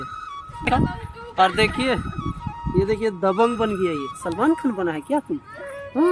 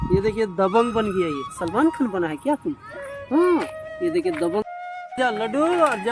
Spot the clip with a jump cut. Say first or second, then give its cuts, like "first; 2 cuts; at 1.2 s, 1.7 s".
second; 1 cut; at 4.7 s